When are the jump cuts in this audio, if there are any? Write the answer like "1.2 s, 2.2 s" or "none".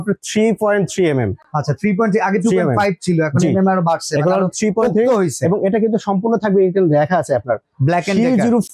none